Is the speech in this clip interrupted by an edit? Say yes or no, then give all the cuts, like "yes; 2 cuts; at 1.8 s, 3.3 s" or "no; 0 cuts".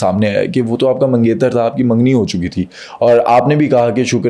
no; 0 cuts